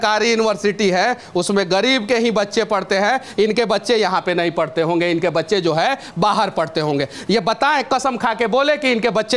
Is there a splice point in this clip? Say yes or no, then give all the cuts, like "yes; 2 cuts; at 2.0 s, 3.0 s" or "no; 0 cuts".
no; 0 cuts